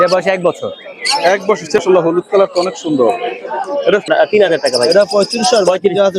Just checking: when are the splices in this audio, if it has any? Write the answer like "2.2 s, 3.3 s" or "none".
1.8 s, 4.1 s